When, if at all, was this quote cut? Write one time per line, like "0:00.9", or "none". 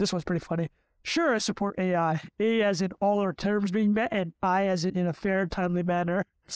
none